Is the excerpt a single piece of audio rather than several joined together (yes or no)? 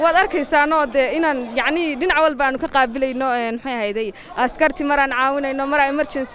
yes